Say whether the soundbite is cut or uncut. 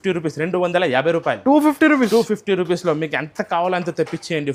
uncut